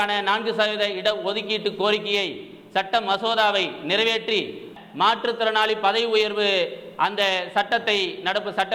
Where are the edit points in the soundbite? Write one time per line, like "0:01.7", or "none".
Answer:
0:04.7